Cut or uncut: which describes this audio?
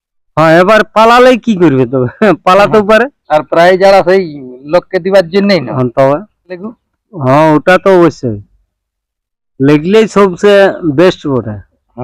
cut